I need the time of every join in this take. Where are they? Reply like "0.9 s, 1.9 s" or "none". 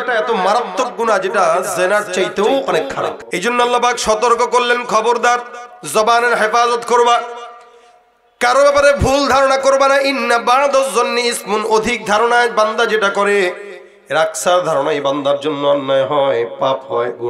3.3 s